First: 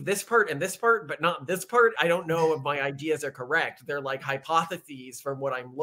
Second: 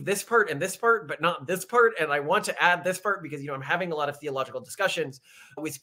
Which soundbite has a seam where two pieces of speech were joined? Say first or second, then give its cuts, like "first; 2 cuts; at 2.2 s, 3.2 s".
first; 1 cut; at 2.0 s